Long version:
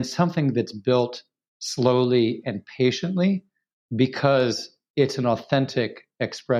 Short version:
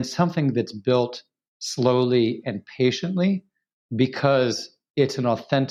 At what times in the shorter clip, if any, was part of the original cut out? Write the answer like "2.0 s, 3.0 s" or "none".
none